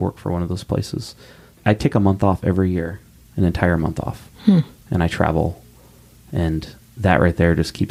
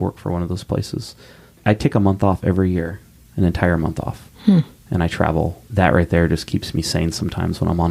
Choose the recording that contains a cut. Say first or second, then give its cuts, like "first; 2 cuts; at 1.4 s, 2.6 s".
second; 1 cut; at 5.6 s